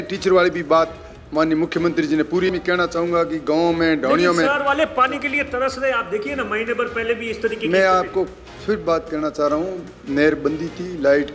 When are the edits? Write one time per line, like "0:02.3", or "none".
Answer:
0:02.5